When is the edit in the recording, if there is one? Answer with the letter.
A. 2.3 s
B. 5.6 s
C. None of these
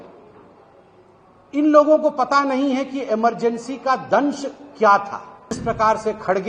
B